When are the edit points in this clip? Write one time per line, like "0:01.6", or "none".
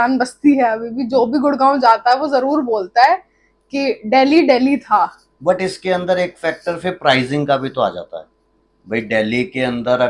none